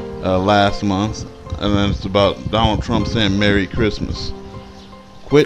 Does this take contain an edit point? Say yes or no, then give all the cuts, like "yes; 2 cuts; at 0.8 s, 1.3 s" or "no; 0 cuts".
no; 0 cuts